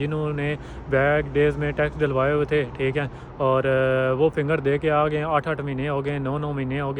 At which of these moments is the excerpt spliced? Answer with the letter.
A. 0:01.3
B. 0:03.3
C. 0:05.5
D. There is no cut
D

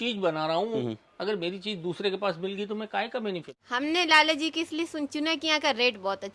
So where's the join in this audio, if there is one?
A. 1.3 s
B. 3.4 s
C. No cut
B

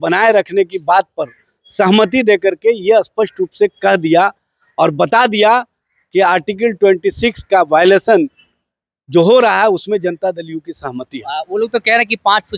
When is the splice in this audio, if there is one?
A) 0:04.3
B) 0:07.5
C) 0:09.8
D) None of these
D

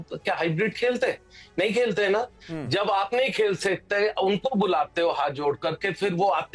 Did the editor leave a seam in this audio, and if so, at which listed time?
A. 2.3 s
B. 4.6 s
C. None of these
C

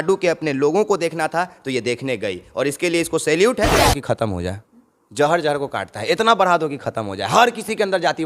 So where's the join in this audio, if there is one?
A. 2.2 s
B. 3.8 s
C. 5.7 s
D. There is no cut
B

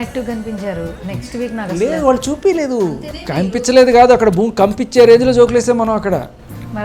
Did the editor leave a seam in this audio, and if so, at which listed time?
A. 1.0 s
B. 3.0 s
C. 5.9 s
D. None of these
B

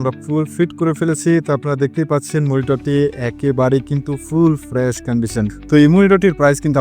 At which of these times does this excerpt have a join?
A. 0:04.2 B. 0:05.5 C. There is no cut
B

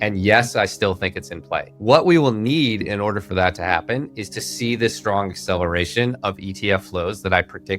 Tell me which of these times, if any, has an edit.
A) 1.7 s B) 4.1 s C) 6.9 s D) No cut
A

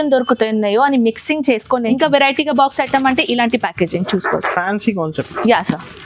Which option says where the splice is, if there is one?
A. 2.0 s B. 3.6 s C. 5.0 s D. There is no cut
A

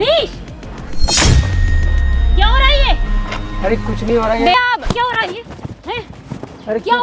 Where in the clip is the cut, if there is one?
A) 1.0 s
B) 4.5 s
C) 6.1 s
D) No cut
B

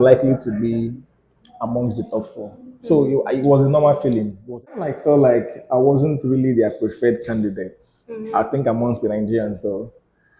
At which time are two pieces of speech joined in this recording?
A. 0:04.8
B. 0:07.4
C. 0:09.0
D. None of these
A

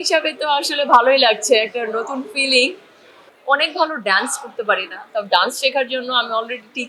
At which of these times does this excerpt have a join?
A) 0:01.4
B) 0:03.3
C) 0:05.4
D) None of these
B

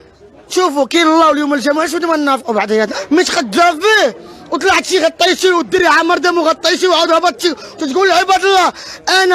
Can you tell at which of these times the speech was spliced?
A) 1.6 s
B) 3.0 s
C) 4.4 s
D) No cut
B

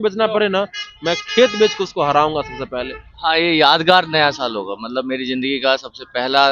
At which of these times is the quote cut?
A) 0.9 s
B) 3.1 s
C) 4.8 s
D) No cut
B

